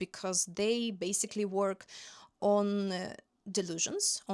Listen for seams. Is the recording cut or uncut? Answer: uncut